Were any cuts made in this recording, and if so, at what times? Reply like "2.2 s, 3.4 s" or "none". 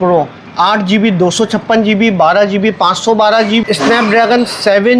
3.6 s